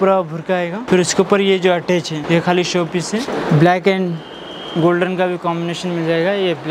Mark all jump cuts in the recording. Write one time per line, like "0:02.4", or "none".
0:00.8
0:02.2
0:03.3